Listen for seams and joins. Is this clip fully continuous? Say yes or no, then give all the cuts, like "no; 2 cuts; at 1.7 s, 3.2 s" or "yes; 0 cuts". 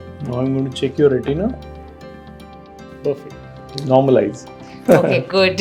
yes; 0 cuts